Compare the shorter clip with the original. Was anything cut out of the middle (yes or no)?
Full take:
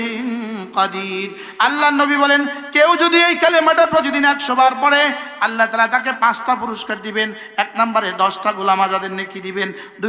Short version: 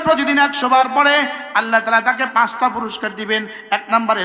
no